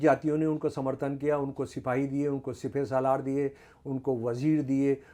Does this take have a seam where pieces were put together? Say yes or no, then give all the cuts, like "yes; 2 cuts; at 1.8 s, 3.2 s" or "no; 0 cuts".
no; 0 cuts